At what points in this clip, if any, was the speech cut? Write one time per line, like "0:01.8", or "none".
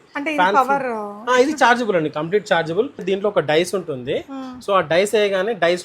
0:03.0